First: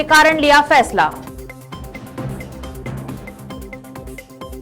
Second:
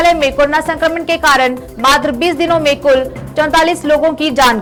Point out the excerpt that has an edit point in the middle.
first; 2 cuts; at 1.1 s, 3.2 s

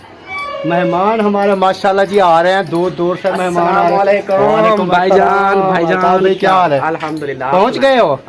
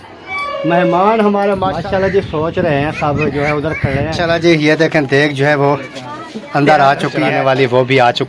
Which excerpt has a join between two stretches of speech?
second; 3 cuts; at 1.7 s, 4.2 s, 7.3 s

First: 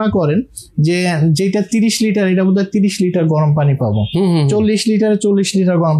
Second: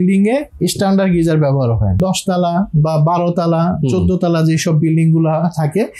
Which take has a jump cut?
second; 1 cut; at 2.0 s

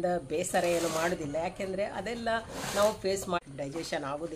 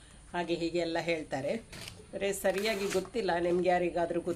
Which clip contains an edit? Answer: first; 1 cut; at 3.4 s

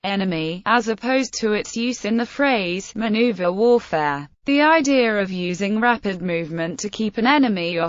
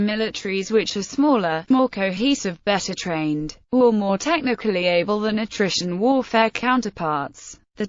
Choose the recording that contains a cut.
second; 1 cut; at 5.2 s

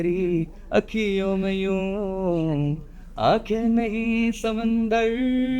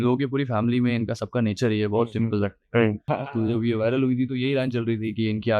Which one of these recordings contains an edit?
second; 1 cut; at 3.1 s

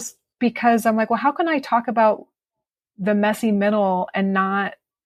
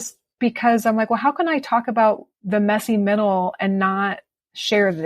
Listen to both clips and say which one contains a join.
second; 1 cut; at 2.3 s

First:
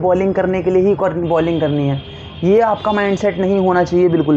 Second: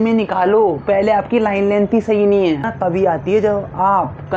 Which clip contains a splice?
second; 1 cut; at 2.7 s

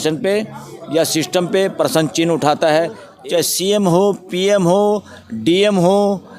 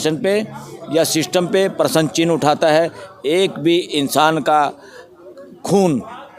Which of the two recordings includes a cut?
first; 1 cut; at 3.1 s

